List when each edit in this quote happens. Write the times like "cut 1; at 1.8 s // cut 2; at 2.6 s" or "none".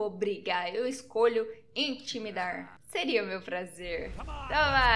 cut 1; at 2.8 s